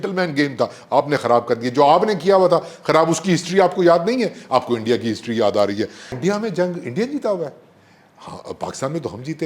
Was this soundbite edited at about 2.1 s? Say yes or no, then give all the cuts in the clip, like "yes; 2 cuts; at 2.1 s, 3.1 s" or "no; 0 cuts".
no; 1 cut; at 6.2 s